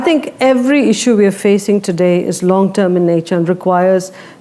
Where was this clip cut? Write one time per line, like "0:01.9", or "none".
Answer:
none